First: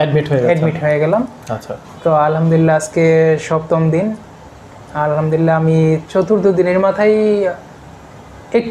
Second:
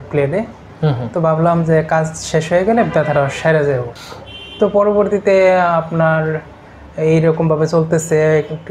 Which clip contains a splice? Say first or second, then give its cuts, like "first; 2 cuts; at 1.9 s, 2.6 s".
second; 1 cut; at 4.0 s